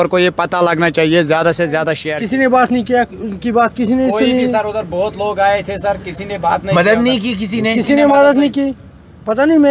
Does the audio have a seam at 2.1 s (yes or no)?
yes